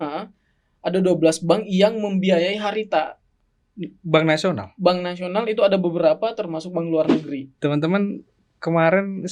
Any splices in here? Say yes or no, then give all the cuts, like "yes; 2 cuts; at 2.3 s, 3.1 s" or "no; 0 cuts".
yes; 1 cut; at 7.5 s